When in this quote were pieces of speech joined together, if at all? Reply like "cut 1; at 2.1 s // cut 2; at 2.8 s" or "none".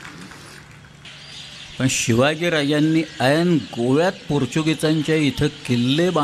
cut 1; at 1.0 s